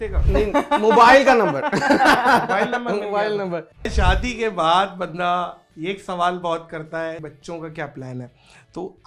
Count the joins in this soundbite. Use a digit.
2